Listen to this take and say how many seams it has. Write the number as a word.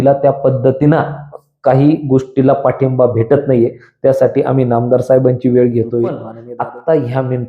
one